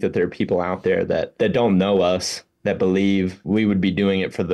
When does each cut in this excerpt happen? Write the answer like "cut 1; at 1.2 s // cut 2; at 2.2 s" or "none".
cut 1; at 1.3 s // cut 2; at 3.4 s